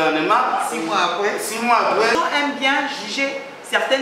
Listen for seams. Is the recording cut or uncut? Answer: cut